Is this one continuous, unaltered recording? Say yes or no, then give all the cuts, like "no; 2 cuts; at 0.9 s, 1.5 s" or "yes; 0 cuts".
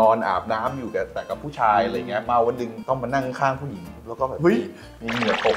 yes; 0 cuts